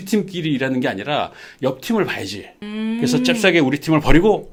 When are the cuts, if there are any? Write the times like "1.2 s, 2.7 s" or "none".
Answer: none